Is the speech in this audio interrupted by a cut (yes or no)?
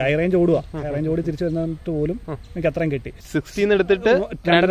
yes